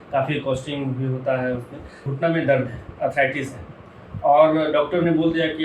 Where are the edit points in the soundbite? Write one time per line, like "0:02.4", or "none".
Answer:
0:02.1